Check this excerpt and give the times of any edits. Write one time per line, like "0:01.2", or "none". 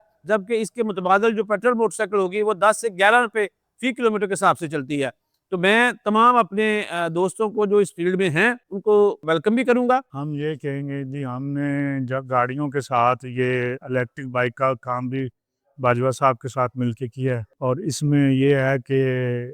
0:10.2